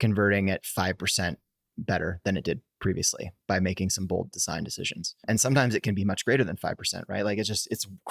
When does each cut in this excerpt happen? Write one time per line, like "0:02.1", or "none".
0:05.2